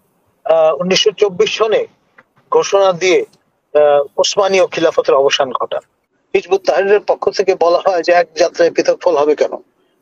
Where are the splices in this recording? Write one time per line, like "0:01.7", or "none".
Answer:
0:06.1